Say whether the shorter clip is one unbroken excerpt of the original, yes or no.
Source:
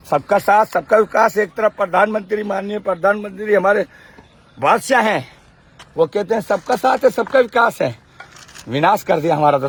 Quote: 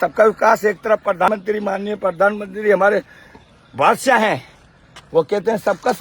no